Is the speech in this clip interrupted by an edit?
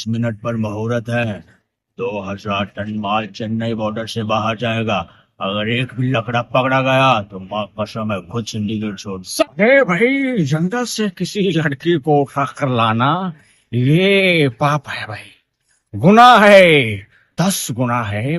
yes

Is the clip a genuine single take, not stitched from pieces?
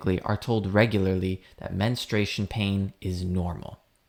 yes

